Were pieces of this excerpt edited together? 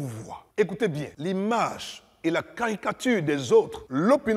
yes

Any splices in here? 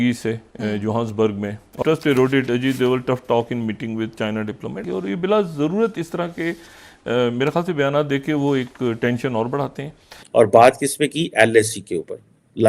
yes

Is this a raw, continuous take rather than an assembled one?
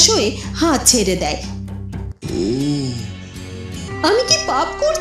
no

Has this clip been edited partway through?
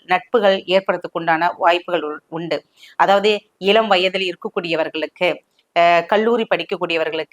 no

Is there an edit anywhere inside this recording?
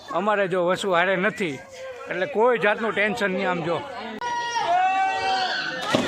yes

